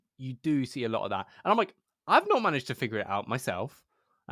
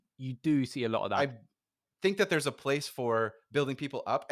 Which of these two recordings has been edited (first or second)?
second